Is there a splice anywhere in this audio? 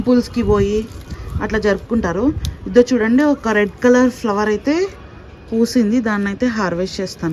no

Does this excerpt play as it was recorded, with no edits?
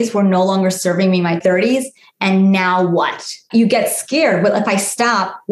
no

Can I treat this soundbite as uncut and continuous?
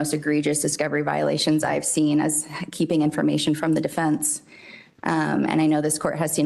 yes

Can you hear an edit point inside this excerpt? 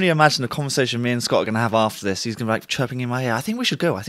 no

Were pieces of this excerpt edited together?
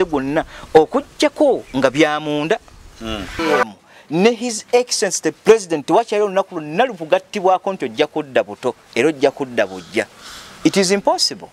yes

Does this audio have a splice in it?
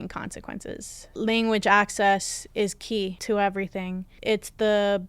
yes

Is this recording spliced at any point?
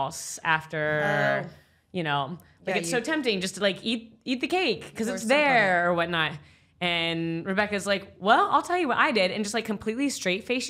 no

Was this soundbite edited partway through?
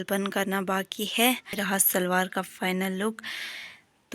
yes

